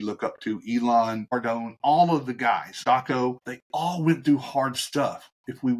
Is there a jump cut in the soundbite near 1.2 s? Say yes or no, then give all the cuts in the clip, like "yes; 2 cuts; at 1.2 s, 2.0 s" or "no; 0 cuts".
yes; 3 cuts; at 1.2 s, 2.7 s, 3.5 s